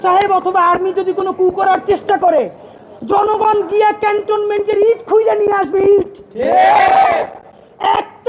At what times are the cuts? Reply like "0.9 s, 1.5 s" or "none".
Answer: none

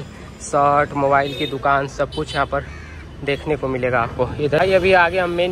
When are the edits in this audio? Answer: 4.6 s

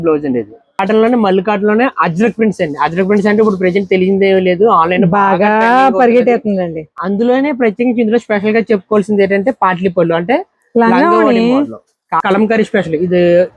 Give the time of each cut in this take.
0.8 s, 12.2 s

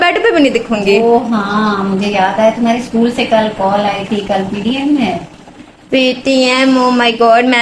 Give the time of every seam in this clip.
none

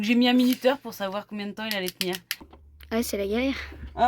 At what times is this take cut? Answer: 2.6 s

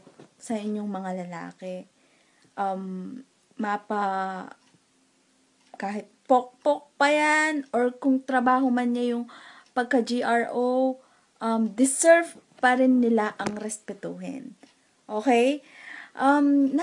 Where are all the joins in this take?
none

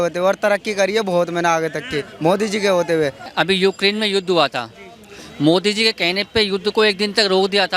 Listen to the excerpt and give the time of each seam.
3.2 s

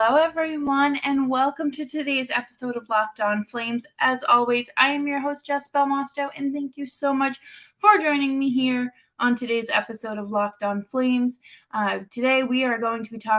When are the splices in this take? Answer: none

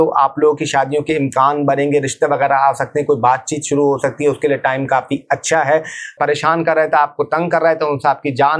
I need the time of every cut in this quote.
6.1 s

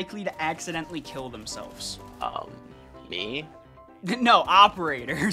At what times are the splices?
none

